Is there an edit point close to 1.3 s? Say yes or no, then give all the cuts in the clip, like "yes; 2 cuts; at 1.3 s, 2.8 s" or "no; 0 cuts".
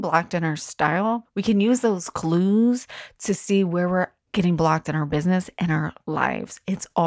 yes; 2 cuts; at 1.3 s, 4.2 s